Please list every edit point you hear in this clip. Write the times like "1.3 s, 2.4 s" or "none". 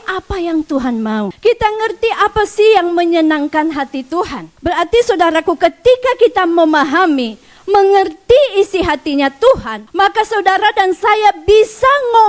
1.3 s, 4.5 s, 9.8 s